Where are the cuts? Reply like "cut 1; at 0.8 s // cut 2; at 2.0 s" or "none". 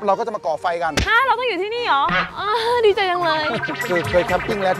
cut 1; at 1.0 s // cut 2; at 2.2 s // cut 3; at 3.8 s